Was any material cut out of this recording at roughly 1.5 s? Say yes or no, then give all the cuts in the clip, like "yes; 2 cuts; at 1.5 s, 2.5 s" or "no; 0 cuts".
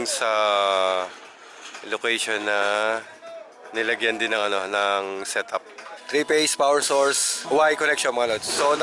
no; 1 cut; at 6.0 s